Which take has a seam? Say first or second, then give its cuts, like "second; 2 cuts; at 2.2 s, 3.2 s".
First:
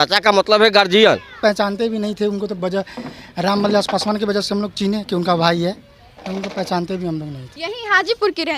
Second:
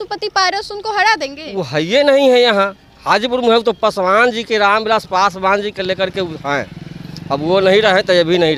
first; 2 cuts; at 1.3 s, 7.4 s